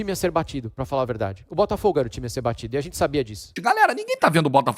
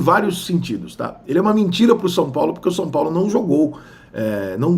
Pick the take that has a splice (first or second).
first